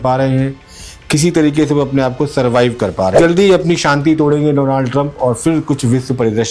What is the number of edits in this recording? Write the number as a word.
one